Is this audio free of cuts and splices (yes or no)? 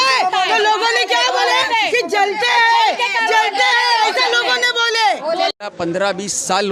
no